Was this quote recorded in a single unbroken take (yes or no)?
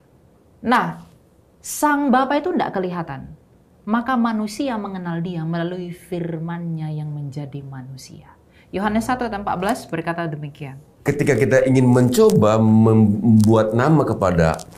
no